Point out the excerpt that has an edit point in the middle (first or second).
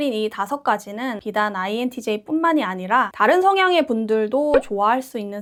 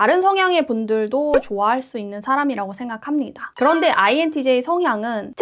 second